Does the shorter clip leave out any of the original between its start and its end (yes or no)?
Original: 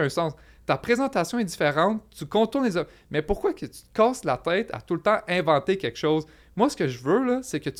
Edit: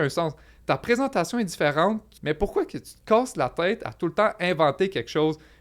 yes